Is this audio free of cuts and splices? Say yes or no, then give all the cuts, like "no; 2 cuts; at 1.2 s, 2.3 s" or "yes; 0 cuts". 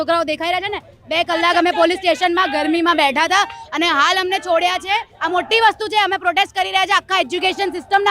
no; 1 cut; at 5.1 s